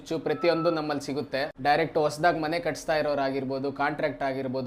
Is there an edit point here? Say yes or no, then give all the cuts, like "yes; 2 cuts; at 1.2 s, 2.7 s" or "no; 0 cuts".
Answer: yes; 1 cut; at 1.5 s